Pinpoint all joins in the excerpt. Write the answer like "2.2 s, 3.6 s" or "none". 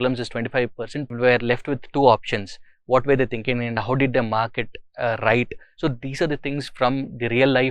1.1 s